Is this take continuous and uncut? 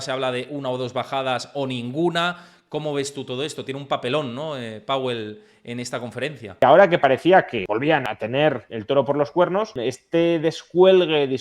no; 3 cuts; at 6.6 s, 8.2 s, 9.7 s

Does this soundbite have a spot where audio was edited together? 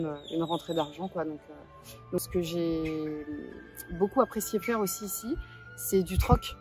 yes; 1 cut; at 2.3 s

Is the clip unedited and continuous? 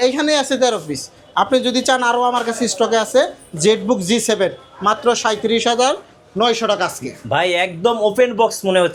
yes; 0 cuts

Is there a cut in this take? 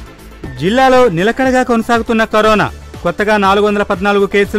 no; 0 cuts

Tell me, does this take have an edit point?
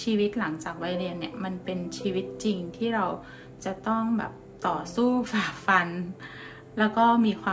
no; 0 cuts

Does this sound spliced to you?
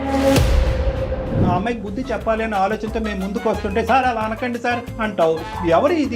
yes; 1 cut; at 1.4 s

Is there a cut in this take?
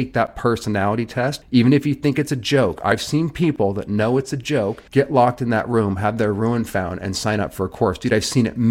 yes; 2 cuts; at 1.4 s, 4.8 s

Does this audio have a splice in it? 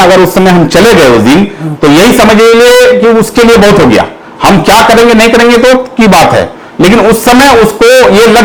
no; 0 cuts

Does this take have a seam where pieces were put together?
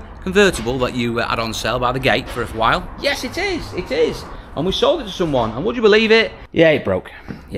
yes; 1 cut; at 6.4 s

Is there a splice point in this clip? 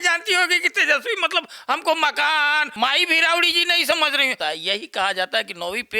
yes; 2 cuts; at 2.7 s, 4.4 s

